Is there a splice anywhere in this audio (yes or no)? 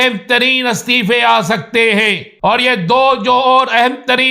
yes